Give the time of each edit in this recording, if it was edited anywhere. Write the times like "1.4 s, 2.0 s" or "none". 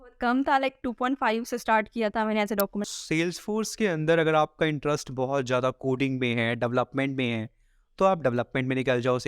2.9 s

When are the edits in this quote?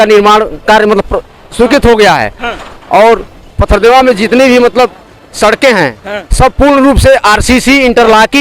none

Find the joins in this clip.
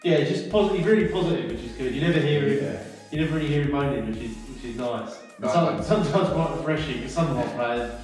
none

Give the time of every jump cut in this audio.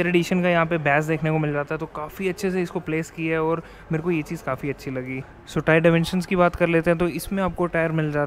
none

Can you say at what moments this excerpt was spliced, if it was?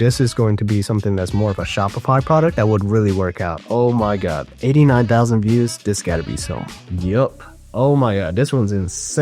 3.6 s

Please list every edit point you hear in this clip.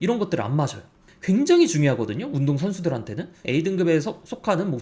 1.1 s, 3.4 s

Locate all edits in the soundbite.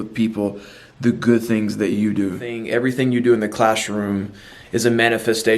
2.6 s

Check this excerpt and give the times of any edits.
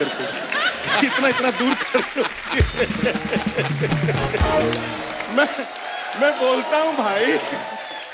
none

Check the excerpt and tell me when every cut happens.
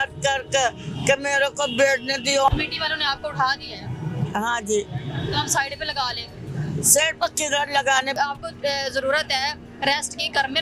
2.5 s, 8.2 s

